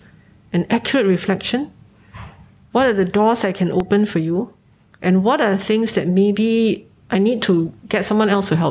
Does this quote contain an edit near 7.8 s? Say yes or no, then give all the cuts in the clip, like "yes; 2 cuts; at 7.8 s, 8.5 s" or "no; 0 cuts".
yes; 2 cuts; at 6.9 s, 7.8 s